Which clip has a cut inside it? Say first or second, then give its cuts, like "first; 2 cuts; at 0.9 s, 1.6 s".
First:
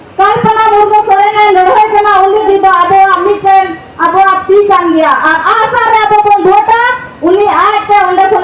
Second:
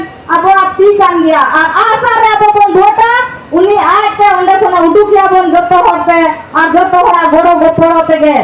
first; 1 cut; at 2.4 s